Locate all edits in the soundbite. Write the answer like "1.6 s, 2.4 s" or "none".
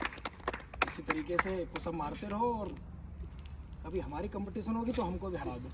none